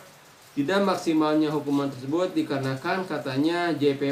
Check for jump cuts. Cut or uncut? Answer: uncut